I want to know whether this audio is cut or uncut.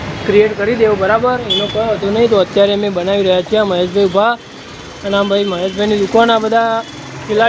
uncut